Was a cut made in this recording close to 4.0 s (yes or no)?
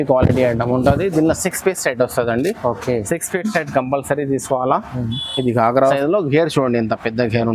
no